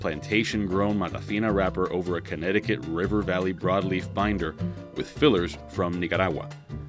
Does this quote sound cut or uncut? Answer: uncut